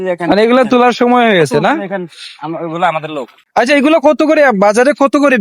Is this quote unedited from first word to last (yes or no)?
no